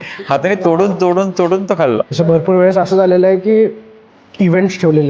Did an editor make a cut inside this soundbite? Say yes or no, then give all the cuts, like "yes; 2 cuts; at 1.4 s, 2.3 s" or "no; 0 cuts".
yes; 1 cut; at 2.1 s